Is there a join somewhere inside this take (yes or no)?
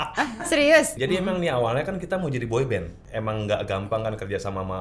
yes